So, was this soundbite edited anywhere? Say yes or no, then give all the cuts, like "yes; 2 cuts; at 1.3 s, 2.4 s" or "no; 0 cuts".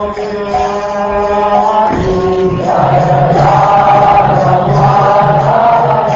yes; 1 cut; at 4.7 s